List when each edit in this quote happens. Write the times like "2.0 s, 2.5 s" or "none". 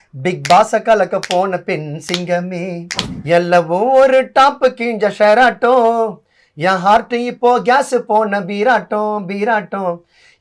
3.0 s